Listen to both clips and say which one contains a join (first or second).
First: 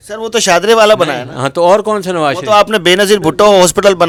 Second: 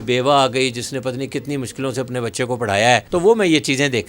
second